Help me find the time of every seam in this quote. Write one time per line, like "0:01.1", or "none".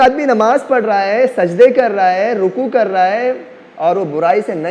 none